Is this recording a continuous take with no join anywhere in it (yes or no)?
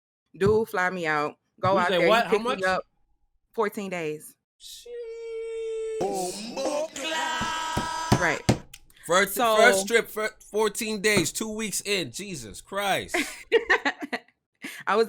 yes